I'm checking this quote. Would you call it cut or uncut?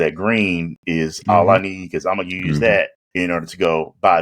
cut